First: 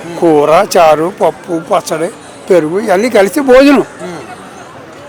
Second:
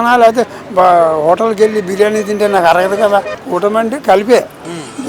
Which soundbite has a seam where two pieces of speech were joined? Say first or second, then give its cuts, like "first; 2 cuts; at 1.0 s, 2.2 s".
second; 1 cut; at 3.4 s